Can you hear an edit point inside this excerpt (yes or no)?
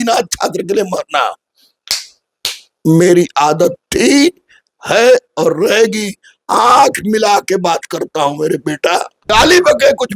yes